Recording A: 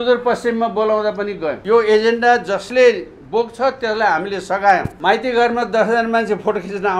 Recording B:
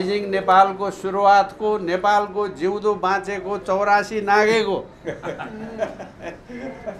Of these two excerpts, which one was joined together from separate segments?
A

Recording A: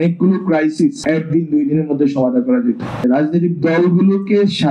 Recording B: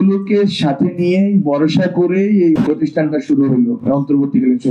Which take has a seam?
A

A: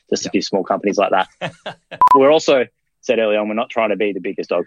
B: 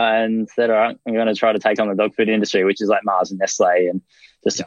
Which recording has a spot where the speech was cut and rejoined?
A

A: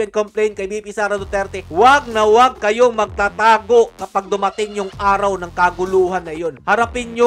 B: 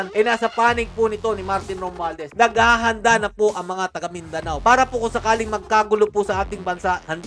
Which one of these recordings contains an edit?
B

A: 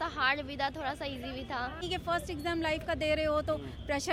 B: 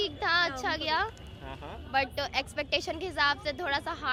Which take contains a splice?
A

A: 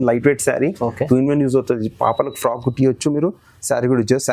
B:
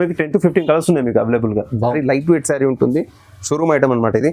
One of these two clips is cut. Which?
B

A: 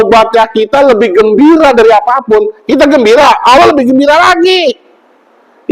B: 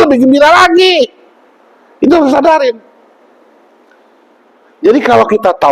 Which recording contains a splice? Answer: B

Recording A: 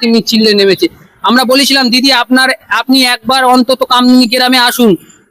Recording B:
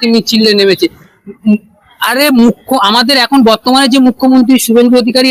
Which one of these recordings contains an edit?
A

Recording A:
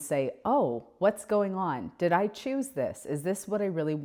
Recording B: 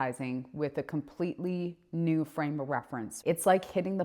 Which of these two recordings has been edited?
B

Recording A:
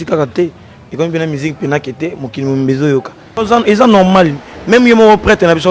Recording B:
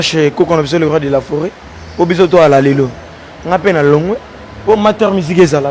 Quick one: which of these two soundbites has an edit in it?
A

